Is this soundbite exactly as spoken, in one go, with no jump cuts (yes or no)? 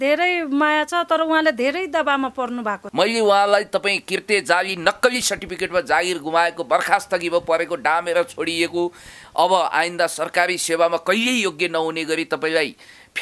no